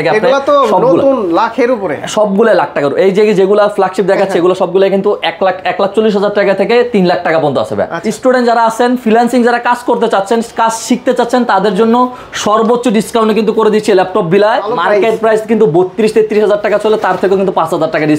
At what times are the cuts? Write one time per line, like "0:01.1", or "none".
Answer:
0:08.0
0:14.8